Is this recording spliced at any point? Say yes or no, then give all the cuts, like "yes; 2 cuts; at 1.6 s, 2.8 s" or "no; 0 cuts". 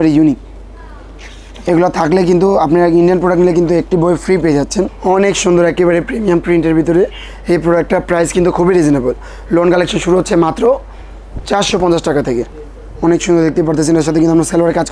yes; 2 cuts; at 4.9 s, 12.6 s